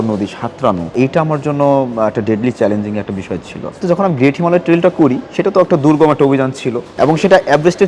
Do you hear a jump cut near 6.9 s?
yes; 3 cuts; at 0.9 s, 3.8 s, 6.9 s

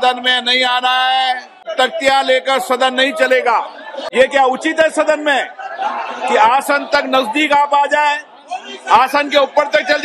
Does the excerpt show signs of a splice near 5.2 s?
no; 2 cuts; at 1.6 s, 3.9 s

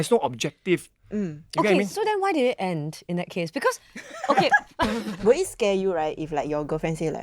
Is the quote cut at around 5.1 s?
yes; 1 cut; at 5.1 s

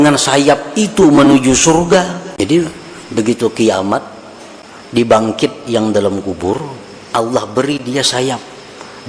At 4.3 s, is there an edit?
no; 1 cut; at 2.2 s

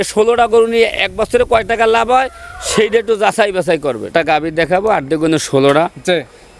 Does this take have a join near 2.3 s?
no; 1 cut; at 4.0 s

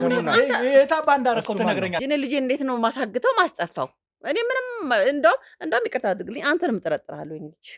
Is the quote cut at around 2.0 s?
yes; 1 cut; at 2.0 s

